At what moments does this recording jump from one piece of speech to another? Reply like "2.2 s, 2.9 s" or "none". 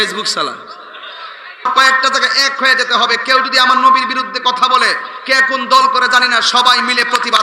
1.7 s